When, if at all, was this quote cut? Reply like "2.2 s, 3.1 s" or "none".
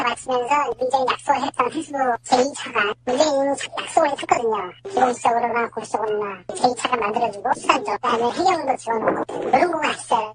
none